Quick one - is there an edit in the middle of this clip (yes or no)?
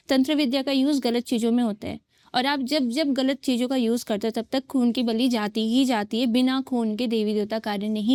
no